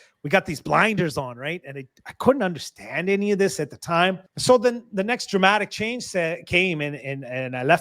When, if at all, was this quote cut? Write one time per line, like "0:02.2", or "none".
0:04.3